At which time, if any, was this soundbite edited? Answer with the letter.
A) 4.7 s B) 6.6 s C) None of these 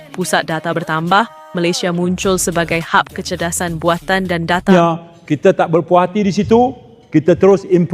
A